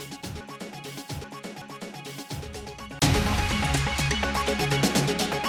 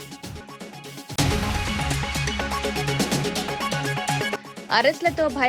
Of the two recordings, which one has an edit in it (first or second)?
second